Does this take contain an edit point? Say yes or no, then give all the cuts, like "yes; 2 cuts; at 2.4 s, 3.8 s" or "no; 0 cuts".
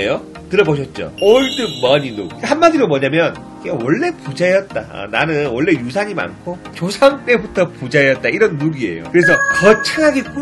no; 0 cuts